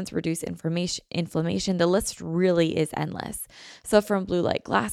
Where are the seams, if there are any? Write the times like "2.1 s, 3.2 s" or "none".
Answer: none